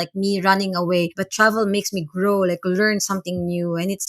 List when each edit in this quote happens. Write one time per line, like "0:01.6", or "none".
0:01.2